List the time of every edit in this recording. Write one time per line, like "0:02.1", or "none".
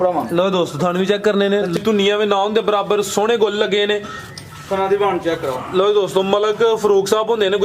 0:01.8